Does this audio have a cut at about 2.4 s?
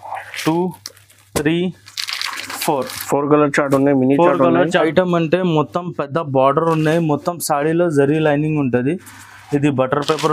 no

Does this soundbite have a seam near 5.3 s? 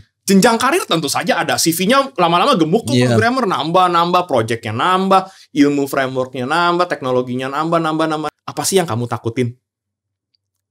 no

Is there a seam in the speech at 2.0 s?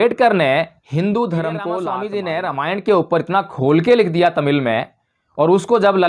yes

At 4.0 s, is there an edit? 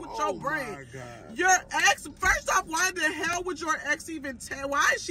no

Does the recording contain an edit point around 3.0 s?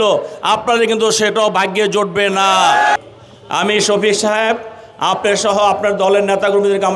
yes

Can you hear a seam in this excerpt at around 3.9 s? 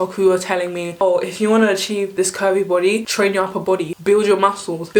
yes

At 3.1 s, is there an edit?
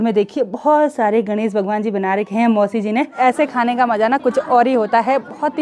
yes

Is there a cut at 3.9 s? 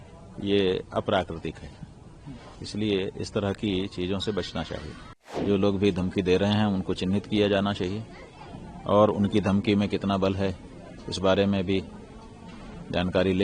no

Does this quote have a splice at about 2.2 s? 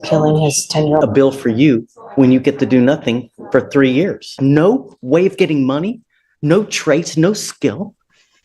no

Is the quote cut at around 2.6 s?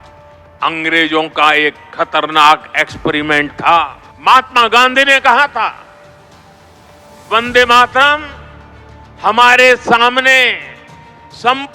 no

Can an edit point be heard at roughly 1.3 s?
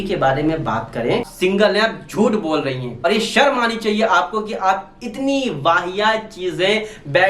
yes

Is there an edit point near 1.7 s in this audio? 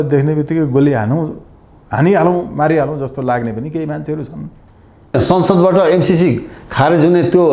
no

